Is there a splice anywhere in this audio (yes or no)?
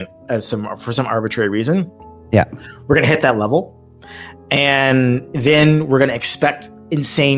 no